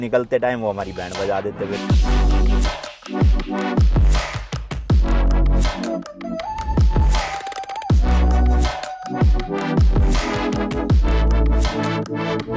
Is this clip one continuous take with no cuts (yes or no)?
yes